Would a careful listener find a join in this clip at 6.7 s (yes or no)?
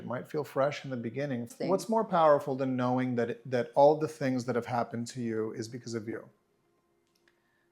no